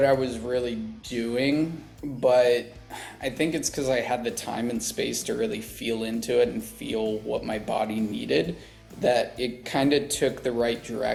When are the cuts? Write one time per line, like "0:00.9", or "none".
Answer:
none